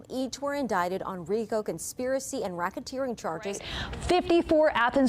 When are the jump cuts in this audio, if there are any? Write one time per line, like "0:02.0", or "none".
0:03.7